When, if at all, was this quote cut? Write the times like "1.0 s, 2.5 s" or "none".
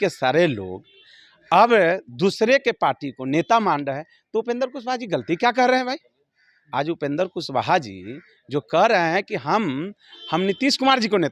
none